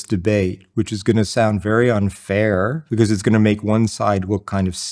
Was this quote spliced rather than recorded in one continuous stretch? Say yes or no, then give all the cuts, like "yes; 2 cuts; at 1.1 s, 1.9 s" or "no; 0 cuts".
yes; 1 cut; at 2.8 s